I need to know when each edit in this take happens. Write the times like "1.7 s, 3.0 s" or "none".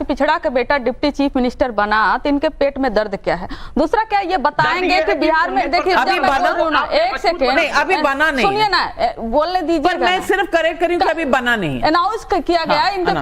1.5 s